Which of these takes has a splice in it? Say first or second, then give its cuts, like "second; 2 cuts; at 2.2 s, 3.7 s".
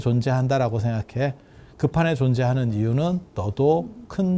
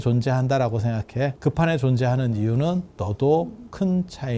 second; 1 cut; at 1.4 s